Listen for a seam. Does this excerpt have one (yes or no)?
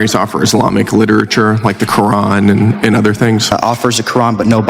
yes